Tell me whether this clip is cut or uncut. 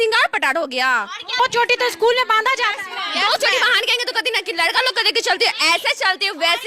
uncut